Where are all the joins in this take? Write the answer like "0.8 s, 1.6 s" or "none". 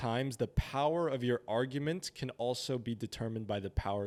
none